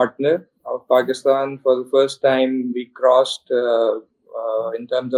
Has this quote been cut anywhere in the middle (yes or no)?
no